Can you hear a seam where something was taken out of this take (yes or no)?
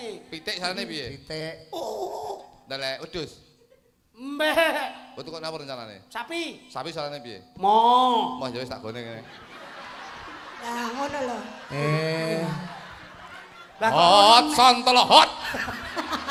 no